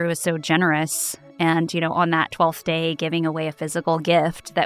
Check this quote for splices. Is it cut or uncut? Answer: uncut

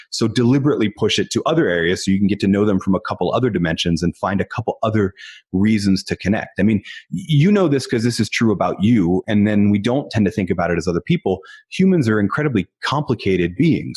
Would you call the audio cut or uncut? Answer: uncut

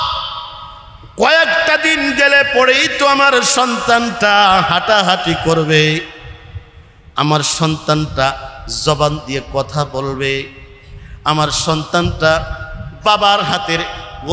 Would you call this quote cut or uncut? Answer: uncut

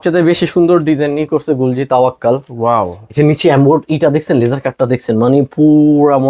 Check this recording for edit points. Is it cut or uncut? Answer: uncut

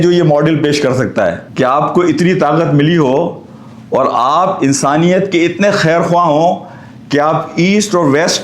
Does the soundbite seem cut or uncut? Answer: uncut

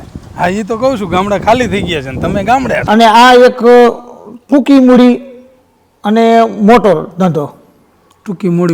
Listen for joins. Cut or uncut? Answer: cut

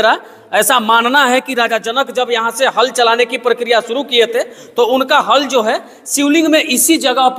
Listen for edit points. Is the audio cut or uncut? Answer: uncut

